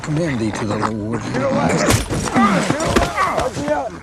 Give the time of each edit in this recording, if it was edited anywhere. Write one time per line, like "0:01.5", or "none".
0:01.2